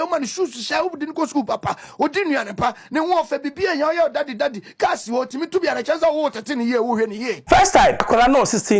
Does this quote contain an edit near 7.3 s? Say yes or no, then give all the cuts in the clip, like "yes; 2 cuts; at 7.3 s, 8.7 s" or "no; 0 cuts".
yes; 2 cuts; at 7.3 s, 8.1 s